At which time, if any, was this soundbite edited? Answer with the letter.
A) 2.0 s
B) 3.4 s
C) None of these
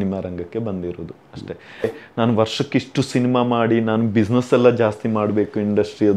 A